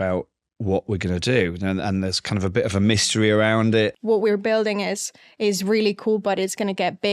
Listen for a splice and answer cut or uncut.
cut